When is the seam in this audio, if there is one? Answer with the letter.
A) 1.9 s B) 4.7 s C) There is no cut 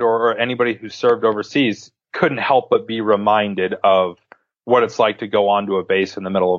A